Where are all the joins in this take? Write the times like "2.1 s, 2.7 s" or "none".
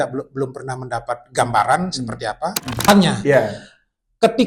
2.9 s